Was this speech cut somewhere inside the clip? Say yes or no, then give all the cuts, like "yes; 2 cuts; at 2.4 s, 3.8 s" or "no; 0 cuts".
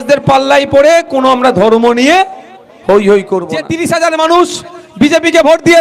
yes; 1 cut; at 3.6 s